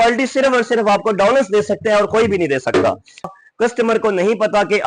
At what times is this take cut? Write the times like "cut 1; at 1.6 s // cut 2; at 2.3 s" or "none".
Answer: cut 1; at 3.3 s

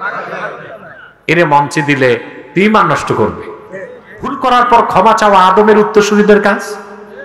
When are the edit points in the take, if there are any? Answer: cut 1; at 4.4 s

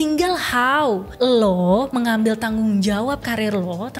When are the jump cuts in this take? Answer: cut 1; at 1.1 s

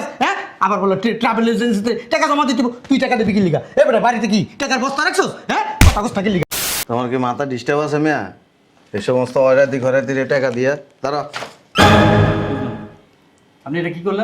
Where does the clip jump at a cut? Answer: cut 1; at 6.4 s

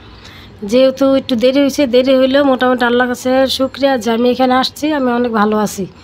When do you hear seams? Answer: none

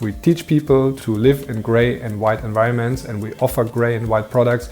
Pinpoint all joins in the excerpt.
cut 1; at 1.0 s

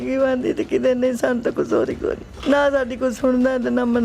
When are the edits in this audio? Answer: cut 1; at 2.3 s

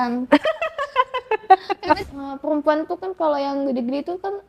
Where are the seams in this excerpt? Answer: cut 1; at 2.0 s

